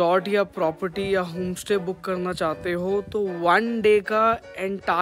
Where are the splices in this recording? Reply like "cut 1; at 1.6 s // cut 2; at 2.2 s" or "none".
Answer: none